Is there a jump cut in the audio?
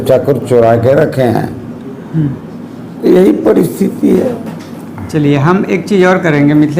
no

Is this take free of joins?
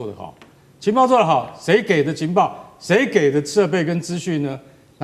yes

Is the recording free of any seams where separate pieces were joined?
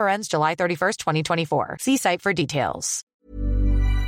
no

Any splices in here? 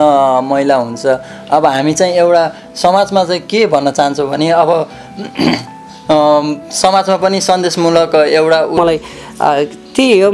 yes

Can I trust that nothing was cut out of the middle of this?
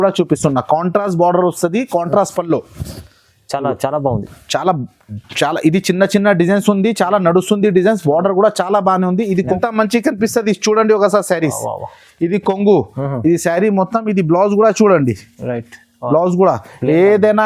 no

